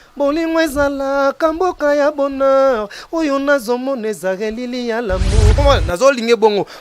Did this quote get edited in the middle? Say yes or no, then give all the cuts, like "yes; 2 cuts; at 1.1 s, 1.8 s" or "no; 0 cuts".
yes; 1 cut; at 5.6 s